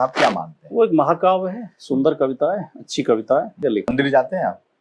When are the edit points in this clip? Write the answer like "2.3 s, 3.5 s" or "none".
3.6 s